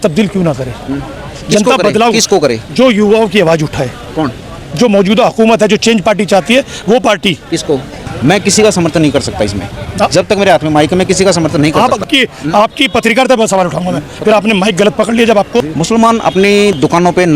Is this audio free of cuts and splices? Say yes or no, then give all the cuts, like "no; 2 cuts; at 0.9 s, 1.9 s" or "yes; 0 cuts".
no; 2 cuts; at 7.9 s, 15.6 s